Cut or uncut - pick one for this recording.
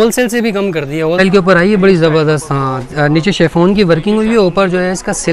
cut